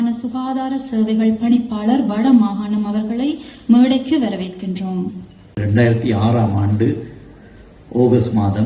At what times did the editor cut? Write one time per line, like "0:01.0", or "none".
0:05.5